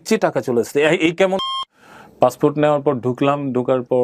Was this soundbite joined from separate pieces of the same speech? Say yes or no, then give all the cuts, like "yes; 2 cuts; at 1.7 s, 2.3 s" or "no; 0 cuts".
yes; 1 cut; at 1.5 s